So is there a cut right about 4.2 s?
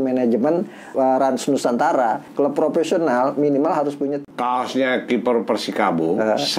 yes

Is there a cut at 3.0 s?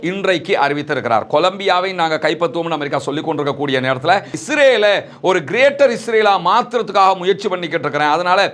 no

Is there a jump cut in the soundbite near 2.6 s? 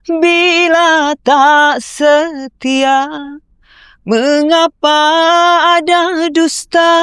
no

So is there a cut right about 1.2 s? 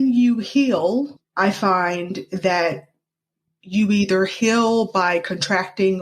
yes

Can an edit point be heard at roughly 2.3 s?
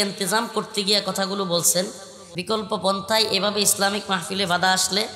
yes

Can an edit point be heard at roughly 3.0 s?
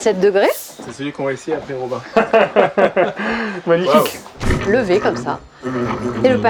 no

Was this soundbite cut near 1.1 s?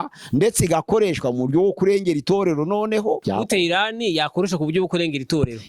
no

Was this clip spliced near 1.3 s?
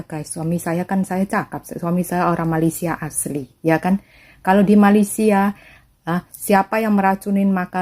no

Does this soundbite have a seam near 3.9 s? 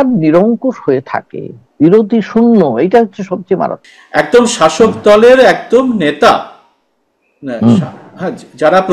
yes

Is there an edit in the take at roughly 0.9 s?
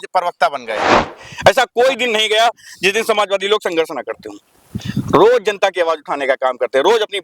yes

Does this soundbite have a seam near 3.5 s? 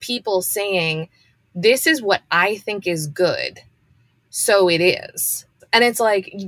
no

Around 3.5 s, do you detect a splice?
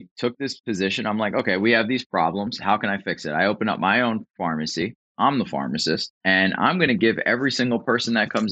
no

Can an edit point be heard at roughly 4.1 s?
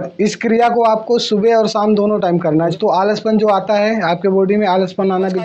no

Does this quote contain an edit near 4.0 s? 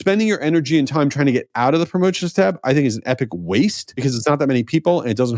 yes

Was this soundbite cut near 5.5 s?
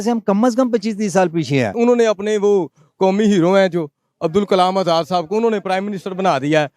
no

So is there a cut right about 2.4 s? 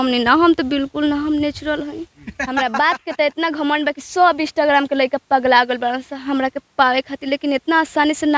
yes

